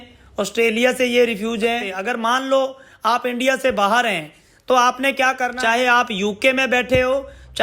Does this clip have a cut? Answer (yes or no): yes